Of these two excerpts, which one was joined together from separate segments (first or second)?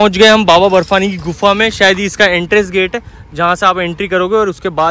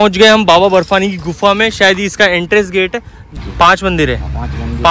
second